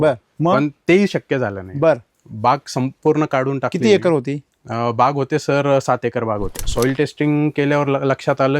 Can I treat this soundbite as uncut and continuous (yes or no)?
no